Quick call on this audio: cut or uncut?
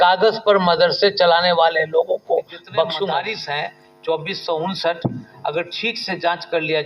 cut